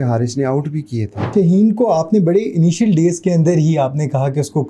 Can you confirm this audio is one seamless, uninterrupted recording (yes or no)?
no